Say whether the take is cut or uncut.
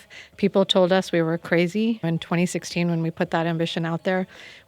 cut